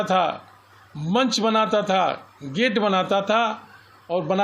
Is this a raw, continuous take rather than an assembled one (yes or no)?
yes